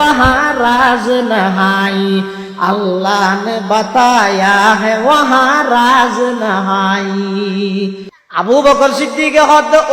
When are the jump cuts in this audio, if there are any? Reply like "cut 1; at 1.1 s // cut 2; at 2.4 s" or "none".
cut 1; at 8.1 s